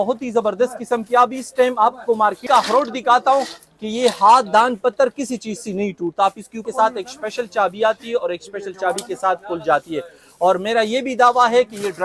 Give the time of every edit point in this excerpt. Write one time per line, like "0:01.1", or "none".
0:02.4
0:06.6